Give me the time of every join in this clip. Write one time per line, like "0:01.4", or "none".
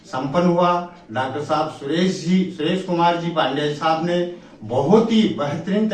none